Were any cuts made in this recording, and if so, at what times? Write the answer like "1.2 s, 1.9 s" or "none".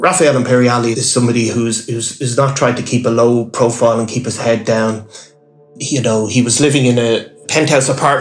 1.0 s, 5.6 s